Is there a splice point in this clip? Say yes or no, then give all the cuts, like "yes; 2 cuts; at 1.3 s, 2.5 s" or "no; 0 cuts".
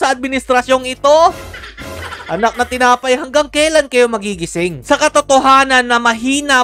no; 0 cuts